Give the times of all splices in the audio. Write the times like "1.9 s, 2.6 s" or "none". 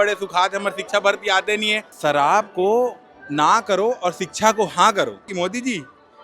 1.9 s, 5.3 s